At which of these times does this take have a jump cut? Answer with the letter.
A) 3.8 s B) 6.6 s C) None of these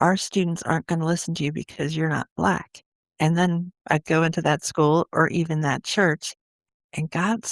B